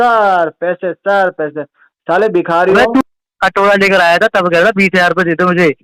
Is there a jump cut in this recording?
yes; 1 cut; at 3.0 s

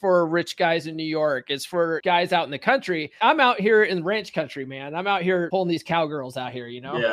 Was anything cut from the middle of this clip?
yes; 3 cuts; at 2.0 s, 3.1 s, 5.5 s

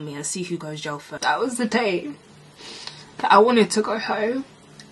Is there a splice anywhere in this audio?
yes; 1 cut; at 1.1 s

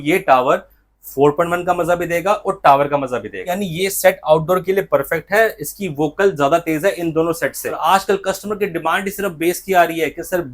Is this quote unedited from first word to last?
no; 2 cuts; at 3.5 s, 7.7 s

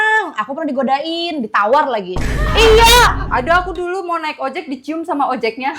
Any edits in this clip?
yes; 1 cut; at 3.2 s

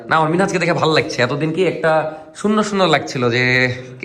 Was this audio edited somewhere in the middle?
no; 0 cuts

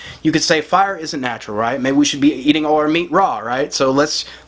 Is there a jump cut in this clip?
no; 0 cuts

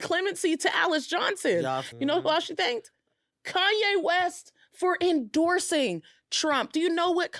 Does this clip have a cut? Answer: yes; 1 cut; at 1.9 s

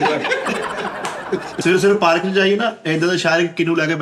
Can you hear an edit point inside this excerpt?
yes; 1 cut; at 1.6 s

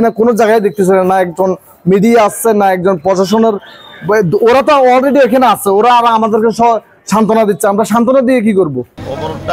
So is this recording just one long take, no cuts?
yes; 0 cuts

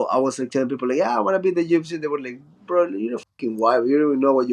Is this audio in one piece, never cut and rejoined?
yes; 0 cuts

